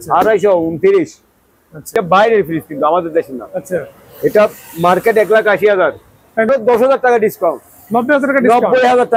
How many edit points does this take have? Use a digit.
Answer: 2